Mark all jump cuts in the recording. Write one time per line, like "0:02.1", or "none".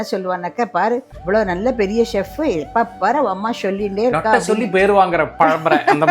0:01.1